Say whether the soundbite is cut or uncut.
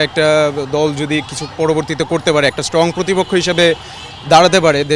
uncut